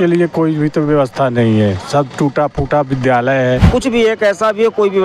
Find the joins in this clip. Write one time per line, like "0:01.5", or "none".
0:03.7